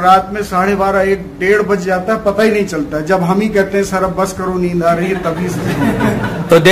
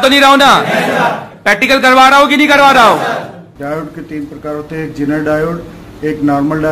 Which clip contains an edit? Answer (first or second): second